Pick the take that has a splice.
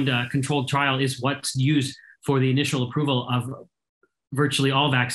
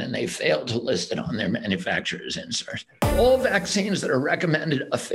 second; 1 cut; at 3.0 s

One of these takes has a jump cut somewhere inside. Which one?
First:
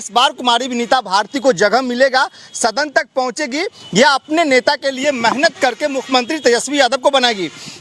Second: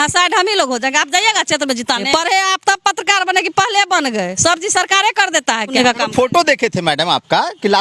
second; 2 cuts; at 2.0 s, 5.7 s

